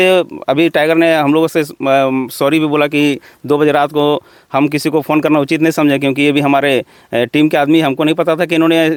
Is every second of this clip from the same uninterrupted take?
yes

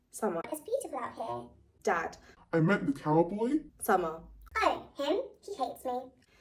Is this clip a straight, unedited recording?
yes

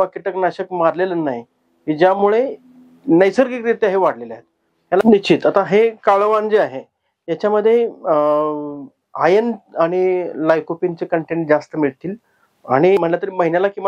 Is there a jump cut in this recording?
yes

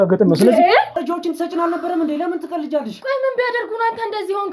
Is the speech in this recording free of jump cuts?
no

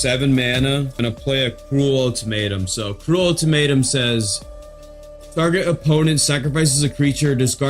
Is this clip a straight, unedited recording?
no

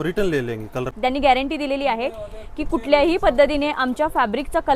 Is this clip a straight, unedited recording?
no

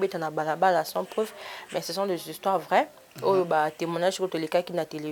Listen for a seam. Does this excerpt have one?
no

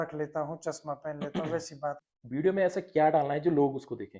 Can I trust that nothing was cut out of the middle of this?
no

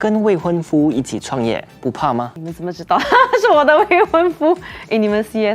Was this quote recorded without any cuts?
yes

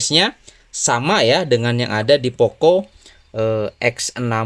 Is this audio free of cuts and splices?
yes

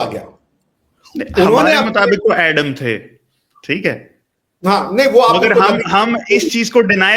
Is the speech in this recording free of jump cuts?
yes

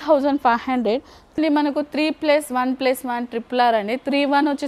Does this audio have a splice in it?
yes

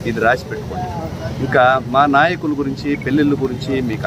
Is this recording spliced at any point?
no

